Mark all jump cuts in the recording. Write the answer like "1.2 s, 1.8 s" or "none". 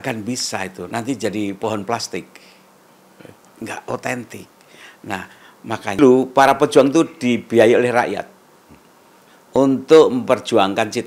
6.0 s